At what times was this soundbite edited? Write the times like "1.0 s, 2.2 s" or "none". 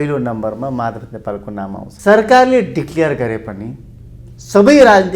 1.9 s